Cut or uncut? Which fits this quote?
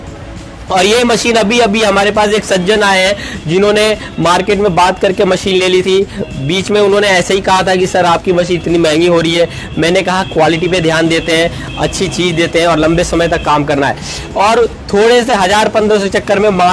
uncut